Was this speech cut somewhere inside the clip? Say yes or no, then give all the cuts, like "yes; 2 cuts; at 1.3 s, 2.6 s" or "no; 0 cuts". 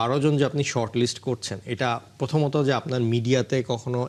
no; 0 cuts